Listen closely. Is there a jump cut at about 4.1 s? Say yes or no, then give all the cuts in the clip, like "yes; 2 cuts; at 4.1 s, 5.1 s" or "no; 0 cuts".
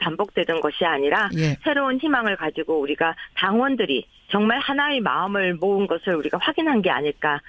no; 1 cut; at 5.3 s